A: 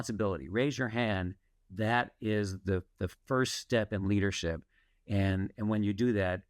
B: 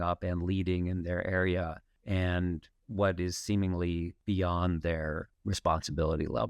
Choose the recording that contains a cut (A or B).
B